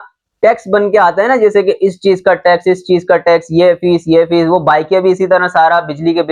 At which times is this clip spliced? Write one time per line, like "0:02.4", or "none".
none